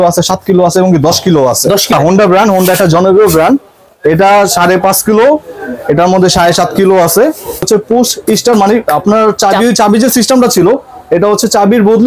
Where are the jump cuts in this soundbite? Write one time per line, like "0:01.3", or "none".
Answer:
0:01.9
0:07.7